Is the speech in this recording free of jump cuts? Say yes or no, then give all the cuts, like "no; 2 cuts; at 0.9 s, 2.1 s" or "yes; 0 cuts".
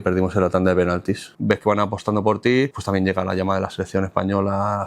no; 2 cuts; at 1.3 s, 2.8 s